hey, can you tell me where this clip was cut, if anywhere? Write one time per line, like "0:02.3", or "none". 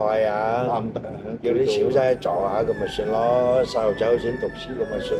none